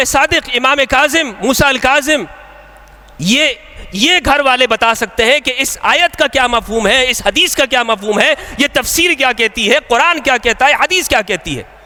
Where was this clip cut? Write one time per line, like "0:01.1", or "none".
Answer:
none

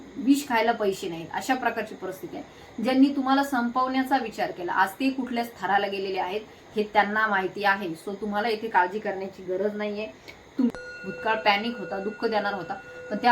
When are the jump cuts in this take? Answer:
0:10.7

